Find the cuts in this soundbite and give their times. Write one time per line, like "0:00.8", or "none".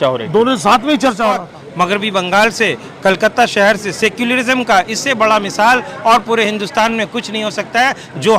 0:01.6